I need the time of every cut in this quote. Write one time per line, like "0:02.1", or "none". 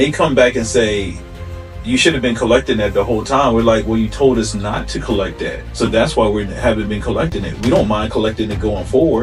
none